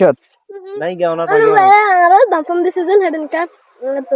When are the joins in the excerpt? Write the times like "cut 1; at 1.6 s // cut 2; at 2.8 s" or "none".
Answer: none